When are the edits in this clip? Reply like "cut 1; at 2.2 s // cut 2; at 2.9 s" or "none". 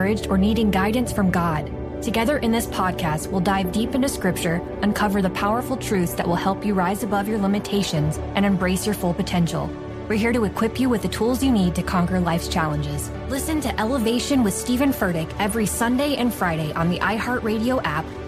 none

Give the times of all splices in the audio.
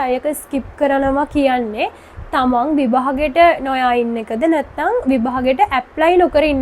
none

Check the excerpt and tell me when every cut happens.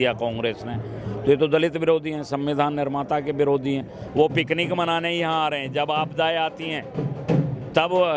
cut 1; at 4.0 s

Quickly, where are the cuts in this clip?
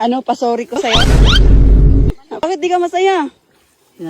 cut 1; at 1.0 s // cut 2; at 2.4 s

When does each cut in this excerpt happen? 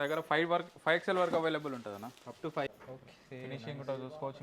cut 1; at 2.7 s

